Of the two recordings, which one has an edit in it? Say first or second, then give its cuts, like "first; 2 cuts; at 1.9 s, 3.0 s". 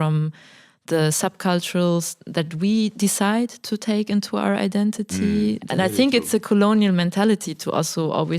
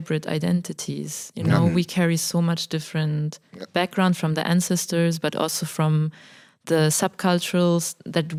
first; 1 cut; at 5.6 s